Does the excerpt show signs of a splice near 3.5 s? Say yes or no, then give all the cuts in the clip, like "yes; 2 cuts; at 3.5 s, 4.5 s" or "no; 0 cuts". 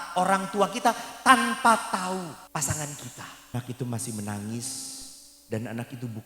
yes; 2 cuts; at 2.4 s, 3.5 s